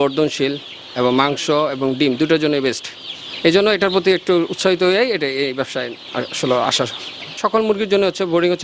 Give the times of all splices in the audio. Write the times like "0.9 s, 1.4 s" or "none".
7.3 s